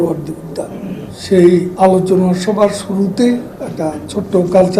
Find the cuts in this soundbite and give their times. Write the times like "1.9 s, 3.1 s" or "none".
1.1 s, 1.7 s, 3.6 s

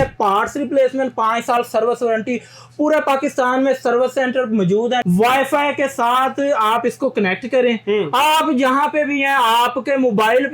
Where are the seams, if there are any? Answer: 5.0 s

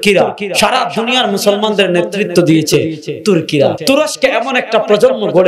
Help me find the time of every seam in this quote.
3.8 s

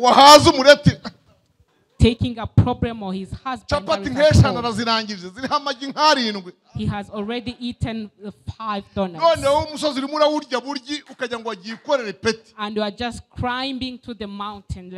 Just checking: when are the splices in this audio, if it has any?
none

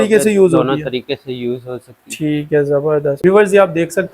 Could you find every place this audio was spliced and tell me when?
3.2 s

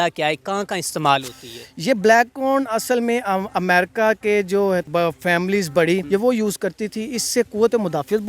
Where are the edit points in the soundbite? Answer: 4.9 s, 6.0 s

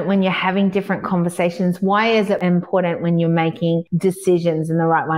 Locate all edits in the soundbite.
2.4 s, 3.9 s

